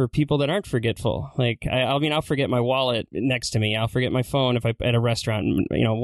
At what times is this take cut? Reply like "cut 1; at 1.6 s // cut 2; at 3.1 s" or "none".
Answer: cut 1; at 3.1 s